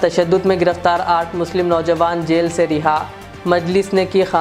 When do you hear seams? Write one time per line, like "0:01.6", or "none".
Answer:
none